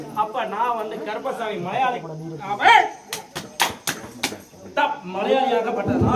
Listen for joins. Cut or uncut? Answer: uncut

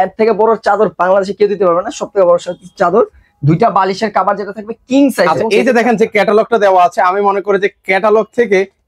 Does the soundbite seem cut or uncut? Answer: cut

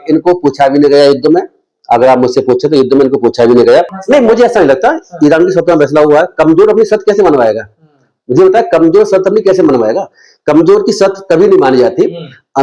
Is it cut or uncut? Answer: cut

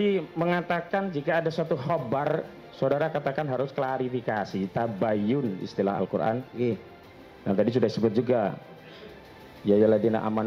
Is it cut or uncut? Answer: uncut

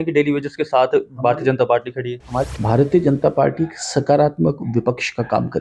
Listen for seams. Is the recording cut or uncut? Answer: cut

